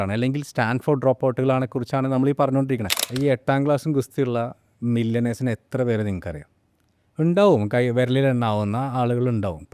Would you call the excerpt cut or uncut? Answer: cut